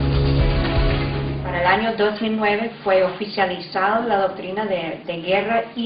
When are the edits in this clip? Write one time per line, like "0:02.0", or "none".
0:01.6